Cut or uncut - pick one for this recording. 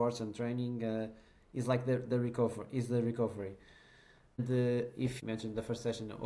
cut